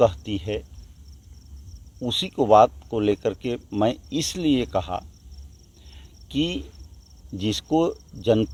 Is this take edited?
no; 0 cuts

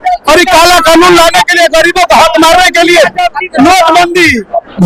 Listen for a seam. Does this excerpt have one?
no; 0 cuts

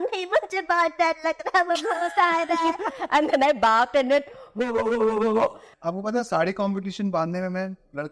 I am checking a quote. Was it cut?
yes; 1 cut; at 5.7 s

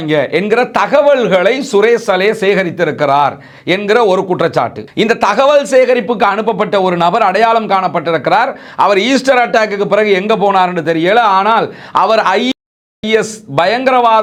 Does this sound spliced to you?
no; 0 cuts

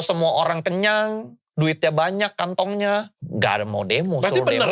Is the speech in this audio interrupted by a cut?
yes; 1 cut; at 3.2 s

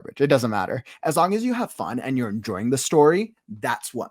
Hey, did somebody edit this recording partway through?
no; 0 cuts

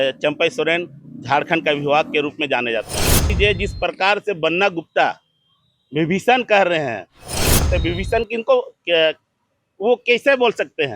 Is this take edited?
yes; 2 cuts; at 3.3 s, 7.7 s

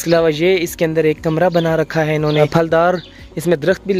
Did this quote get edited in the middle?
yes; 1 cut; at 2.5 s

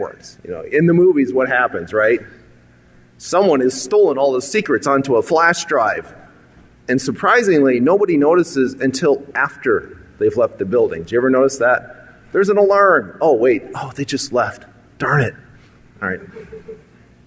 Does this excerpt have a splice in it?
no; 0 cuts

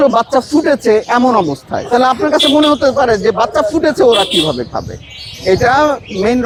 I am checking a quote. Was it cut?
no; 0 cuts

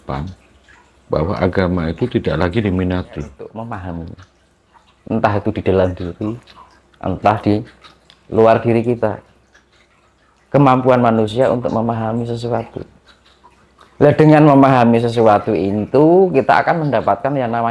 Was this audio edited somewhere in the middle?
yes; 1 cut; at 3.5 s

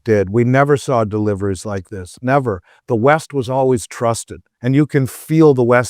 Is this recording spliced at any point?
no; 0 cuts

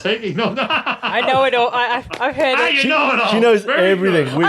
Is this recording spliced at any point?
no; 0 cuts

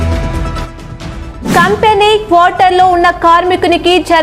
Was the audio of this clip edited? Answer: yes; 1 cut; at 0.9 s

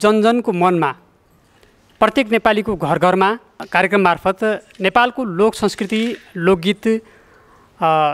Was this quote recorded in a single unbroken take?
yes; 0 cuts

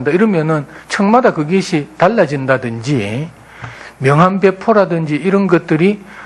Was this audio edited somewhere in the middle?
no; 0 cuts

